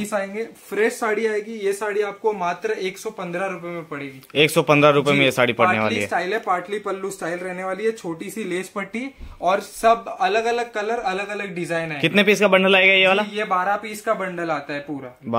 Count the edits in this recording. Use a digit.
0